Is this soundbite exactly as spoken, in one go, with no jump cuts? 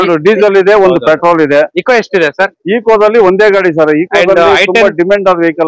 yes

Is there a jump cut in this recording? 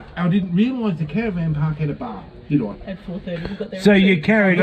no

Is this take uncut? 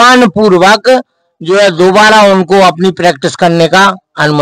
yes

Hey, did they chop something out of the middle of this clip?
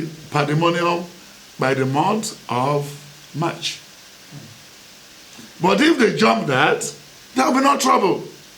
no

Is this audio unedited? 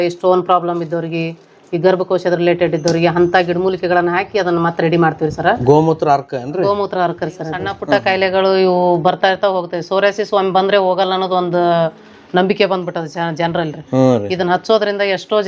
no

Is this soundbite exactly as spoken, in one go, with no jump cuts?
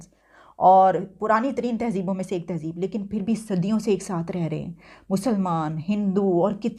yes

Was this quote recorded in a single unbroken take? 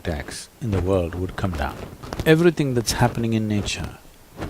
no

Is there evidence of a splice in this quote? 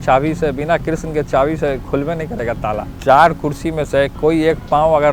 yes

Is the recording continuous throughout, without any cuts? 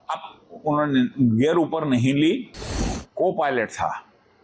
no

